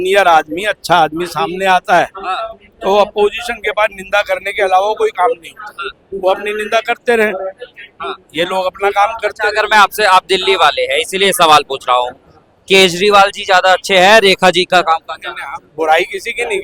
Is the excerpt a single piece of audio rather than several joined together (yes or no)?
yes